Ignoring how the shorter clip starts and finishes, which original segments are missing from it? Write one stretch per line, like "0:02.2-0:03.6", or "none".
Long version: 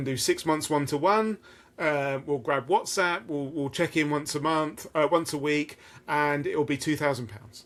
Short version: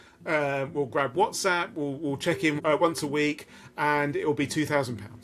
0:04.1-0:04.9